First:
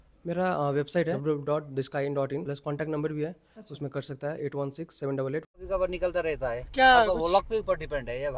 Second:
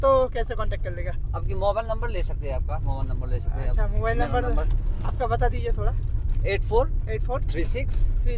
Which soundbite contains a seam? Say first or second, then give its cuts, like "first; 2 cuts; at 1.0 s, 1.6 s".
first; 3 cuts; at 1.2 s, 2.5 s, 5.6 s